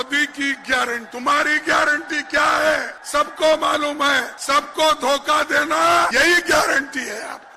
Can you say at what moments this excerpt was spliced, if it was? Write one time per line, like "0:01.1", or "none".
0:01.1
0:03.0
0:04.3
0:06.1